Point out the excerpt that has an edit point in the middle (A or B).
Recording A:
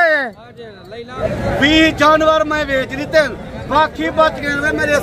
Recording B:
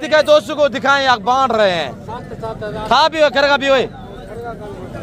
A